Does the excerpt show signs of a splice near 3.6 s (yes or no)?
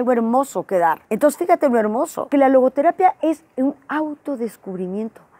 no